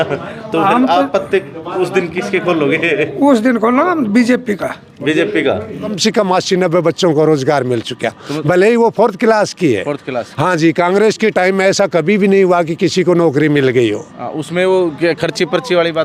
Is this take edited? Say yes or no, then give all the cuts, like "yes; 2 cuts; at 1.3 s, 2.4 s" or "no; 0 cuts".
yes; 1 cut; at 5.9 s